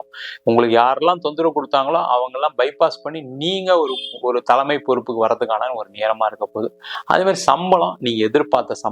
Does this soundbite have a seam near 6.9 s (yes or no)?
yes